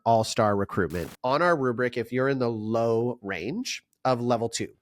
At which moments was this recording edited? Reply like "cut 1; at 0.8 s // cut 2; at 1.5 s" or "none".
cut 1; at 1.1 s